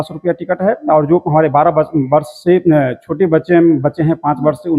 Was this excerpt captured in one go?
yes; 0 cuts

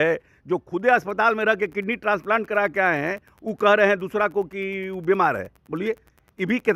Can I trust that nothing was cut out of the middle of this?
yes; 0 cuts

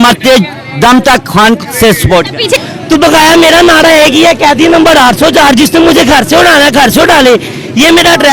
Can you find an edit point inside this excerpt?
yes; 1 cut; at 2.6 s

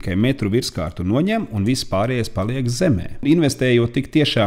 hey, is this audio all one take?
no; 1 cut; at 3.2 s

